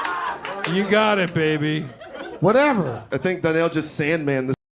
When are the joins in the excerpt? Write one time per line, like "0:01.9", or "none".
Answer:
0:03.1